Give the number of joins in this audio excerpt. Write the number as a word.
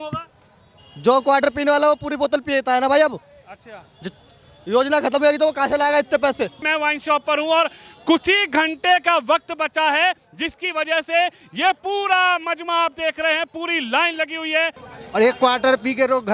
two